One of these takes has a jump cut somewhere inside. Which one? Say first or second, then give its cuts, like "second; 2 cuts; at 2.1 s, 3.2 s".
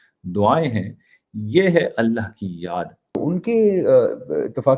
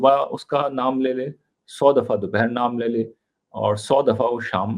first; 1 cut; at 3.2 s